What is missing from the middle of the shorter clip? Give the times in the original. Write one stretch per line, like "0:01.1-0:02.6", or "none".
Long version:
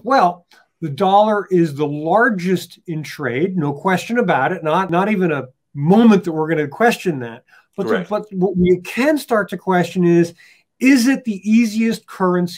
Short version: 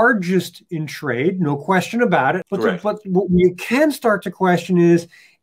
0:04.6-0:07.7